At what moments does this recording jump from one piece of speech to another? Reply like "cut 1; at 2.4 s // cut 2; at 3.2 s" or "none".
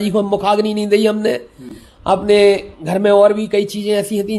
none